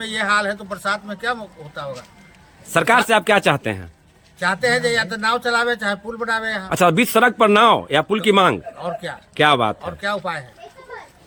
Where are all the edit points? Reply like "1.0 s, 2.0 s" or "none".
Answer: none